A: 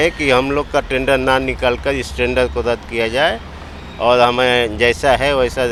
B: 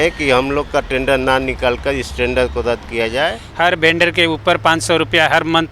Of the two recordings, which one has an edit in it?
B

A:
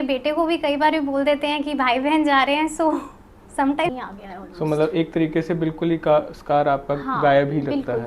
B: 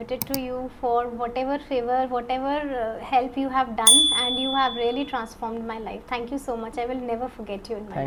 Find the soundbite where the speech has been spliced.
A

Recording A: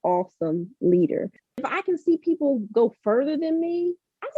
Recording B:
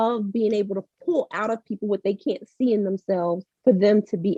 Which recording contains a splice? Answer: A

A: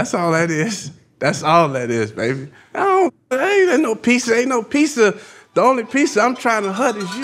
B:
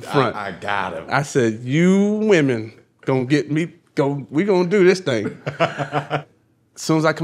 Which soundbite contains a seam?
B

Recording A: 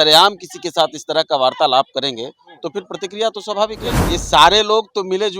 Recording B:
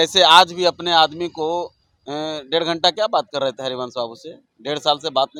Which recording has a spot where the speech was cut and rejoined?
A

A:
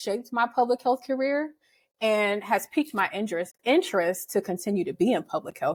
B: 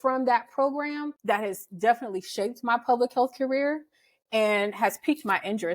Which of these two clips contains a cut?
B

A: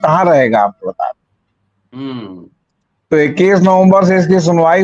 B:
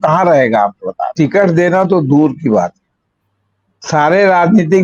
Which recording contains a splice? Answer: B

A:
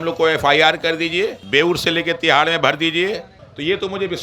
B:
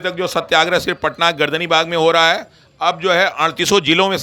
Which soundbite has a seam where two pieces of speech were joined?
A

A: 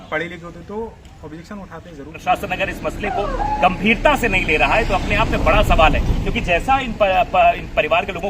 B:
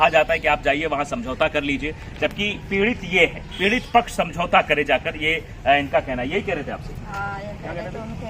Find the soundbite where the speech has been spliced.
A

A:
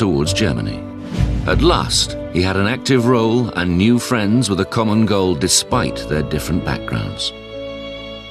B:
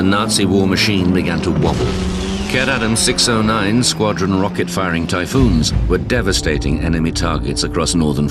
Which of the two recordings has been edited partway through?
B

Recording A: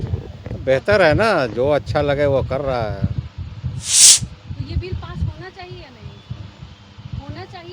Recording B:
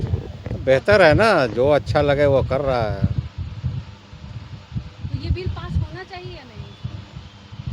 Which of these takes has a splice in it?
A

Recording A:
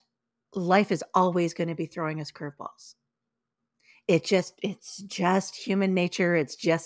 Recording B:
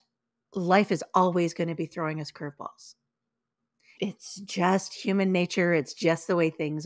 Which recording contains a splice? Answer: B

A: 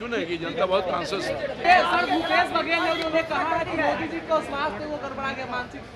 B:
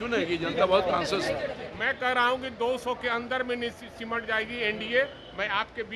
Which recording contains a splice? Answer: B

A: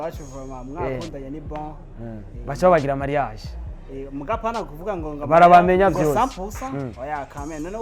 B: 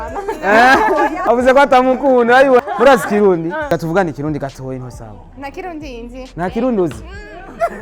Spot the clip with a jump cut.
B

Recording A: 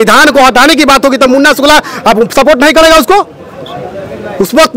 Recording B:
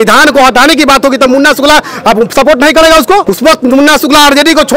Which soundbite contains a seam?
B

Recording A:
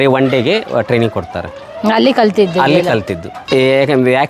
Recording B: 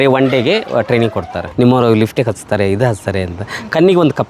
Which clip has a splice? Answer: B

